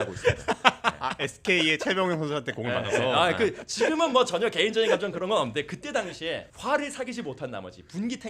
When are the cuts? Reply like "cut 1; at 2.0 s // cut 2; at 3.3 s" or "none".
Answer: cut 1; at 6.5 s